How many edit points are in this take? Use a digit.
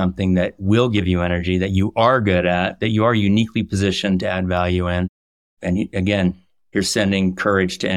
1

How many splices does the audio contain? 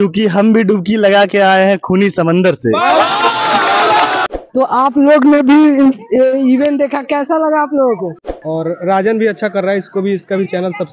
2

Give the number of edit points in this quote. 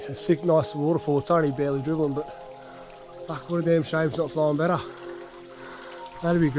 0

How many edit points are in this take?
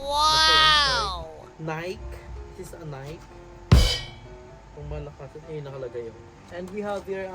2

